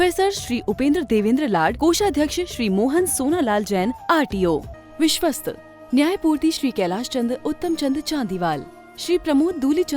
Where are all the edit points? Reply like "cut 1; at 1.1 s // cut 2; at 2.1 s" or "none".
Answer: cut 1; at 4.8 s